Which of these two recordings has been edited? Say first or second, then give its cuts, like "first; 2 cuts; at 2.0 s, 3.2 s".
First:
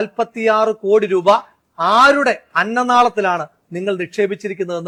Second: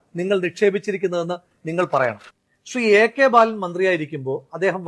second; 1 cut; at 2.3 s